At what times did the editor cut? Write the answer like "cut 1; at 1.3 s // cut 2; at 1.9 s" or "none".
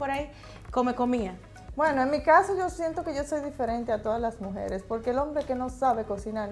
none